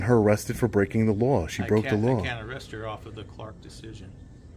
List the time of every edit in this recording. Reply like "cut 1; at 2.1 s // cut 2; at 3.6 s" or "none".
none